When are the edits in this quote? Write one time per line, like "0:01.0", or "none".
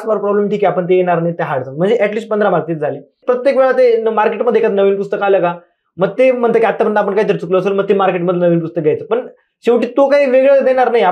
0:03.2